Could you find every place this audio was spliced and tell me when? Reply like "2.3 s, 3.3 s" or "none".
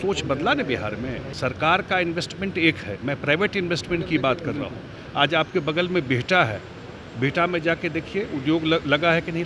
1.2 s